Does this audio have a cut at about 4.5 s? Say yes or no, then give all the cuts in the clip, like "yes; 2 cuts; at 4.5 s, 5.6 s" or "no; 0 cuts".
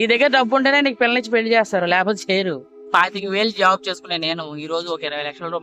no; 1 cut; at 2.8 s